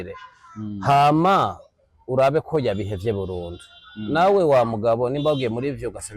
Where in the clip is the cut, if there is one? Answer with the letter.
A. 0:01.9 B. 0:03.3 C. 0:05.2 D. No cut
D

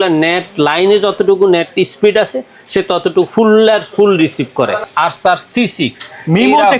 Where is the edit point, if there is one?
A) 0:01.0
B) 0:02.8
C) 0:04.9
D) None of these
C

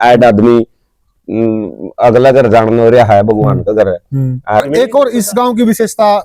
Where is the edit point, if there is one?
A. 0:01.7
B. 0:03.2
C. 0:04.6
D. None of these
C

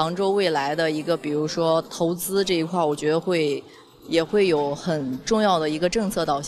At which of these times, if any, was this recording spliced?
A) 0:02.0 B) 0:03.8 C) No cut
C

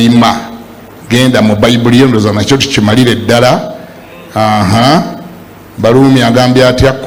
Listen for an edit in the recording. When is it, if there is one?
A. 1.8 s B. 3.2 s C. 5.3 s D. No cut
D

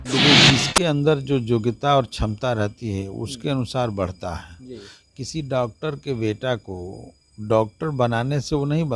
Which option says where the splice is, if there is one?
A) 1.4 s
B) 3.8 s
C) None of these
C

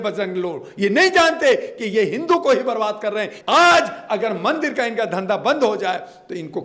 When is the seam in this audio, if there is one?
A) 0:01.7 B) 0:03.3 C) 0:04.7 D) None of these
B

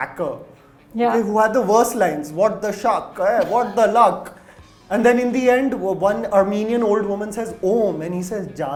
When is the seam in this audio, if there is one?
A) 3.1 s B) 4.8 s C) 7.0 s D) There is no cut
D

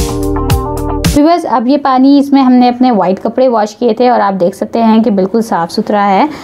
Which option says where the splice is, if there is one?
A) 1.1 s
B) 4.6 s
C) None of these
A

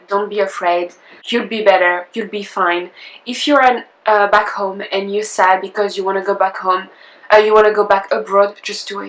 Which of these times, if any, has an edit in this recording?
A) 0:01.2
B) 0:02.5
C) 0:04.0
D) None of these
A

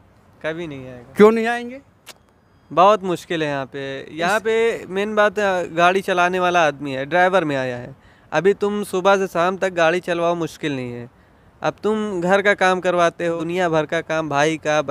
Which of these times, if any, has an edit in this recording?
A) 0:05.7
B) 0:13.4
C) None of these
B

